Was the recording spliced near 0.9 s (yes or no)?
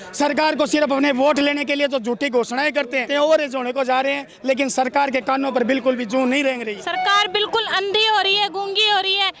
no